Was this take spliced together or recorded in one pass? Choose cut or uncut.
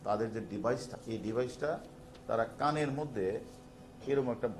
cut